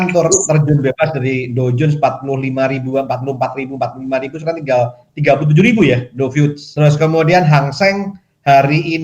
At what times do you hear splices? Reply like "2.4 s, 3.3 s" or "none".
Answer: 6.6 s